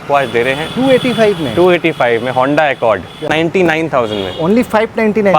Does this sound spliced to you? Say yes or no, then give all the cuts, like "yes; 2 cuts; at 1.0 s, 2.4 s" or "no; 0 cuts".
yes; 1 cut; at 3.2 s